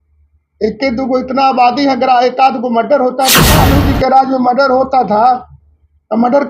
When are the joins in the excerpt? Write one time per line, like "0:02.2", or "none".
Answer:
0:03.4

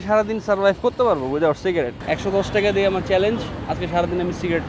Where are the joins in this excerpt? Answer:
0:02.0

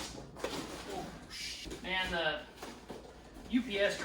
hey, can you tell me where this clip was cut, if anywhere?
0:01.7

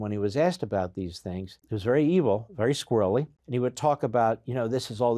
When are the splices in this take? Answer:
0:01.7
0:03.4

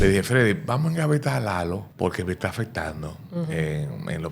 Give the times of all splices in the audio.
0:01.9

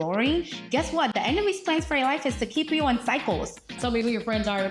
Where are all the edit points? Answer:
0:03.7

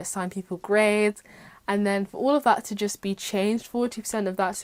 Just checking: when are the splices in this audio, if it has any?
none

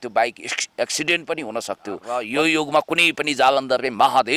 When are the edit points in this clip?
0:02.1

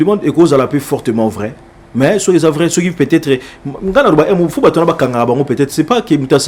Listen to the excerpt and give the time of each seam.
none

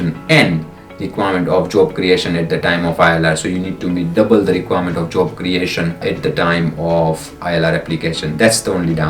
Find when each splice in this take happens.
0:06.0

